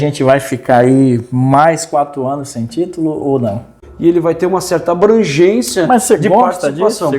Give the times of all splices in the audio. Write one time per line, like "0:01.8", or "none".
0:03.9